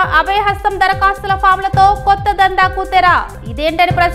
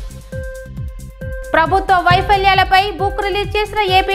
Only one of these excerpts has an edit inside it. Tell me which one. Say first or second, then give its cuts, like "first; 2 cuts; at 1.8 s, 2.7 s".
second; 1 cut; at 1.5 s